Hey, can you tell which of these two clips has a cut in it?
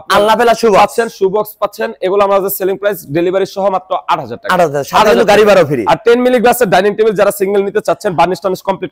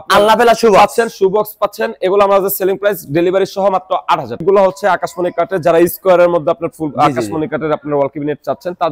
second; 1 cut; at 4.4 s

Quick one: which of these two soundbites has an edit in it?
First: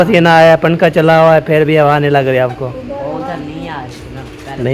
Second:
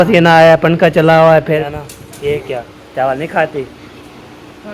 second; 1 cut; at 1.6 s

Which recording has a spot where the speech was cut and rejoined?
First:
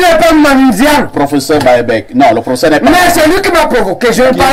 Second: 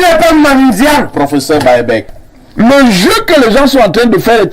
second; 1 cut; at 2.1 s

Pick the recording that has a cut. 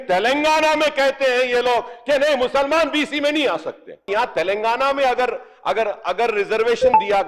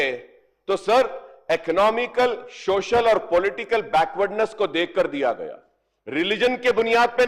first; 1 cut; at 4.1 s

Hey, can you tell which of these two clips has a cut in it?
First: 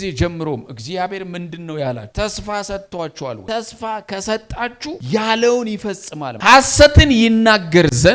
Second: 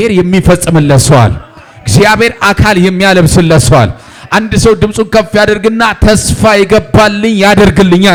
first; 4 cuts; at 2.1 s, 3.4 s, 5.0 s, 6.3 s

